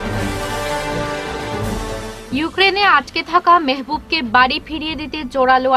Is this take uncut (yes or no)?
no